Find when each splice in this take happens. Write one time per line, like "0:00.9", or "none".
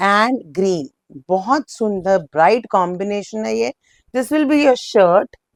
none